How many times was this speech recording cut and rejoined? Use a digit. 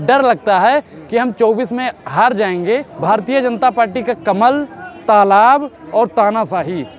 1